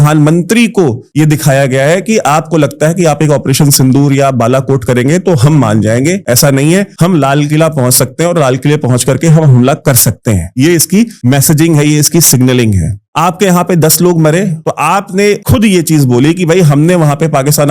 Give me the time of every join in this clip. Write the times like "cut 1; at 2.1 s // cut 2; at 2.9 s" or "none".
none